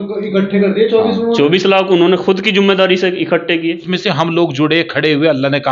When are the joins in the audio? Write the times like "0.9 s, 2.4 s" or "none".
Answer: 3.9 s